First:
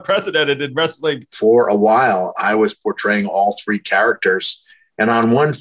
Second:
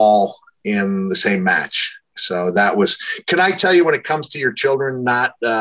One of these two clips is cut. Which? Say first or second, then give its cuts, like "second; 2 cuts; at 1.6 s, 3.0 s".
first; 1 cut; at 1.3 s